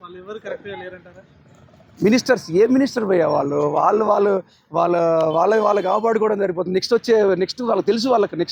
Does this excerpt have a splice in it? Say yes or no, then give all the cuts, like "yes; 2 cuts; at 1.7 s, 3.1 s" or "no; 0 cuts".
no; 0 cuts